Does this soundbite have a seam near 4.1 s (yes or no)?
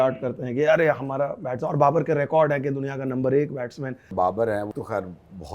yes